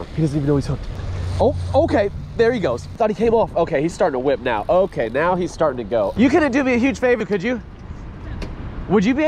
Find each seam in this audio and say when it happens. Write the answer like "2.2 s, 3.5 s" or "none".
1.0 s, 2.9 s, 6.1 s